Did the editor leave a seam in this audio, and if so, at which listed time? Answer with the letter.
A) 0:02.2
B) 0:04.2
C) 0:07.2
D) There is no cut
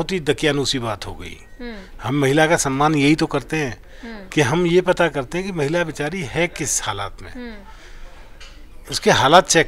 D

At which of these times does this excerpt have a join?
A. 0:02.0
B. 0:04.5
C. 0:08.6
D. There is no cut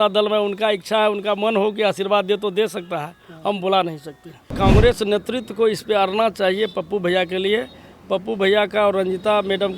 B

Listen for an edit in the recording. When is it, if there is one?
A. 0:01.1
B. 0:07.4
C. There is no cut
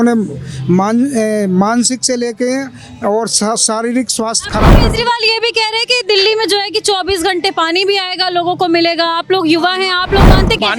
C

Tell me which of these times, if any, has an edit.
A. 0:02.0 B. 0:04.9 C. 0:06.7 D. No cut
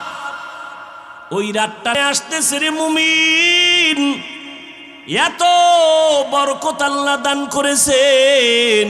A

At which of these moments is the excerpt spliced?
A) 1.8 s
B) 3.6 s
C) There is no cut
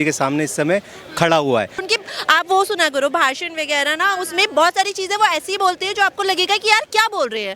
A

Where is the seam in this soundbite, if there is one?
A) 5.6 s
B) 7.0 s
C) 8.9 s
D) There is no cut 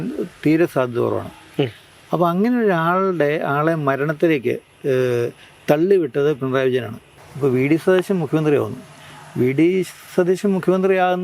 B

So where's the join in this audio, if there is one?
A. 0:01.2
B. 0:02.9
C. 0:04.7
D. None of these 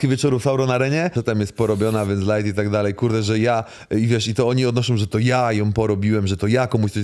A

